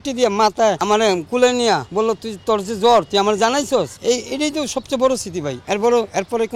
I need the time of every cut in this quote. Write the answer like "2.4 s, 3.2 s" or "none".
0.8 s, 1.9 s, 3.9 s, 5.6 s